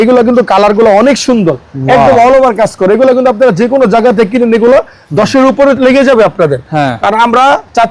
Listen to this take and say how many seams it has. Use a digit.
0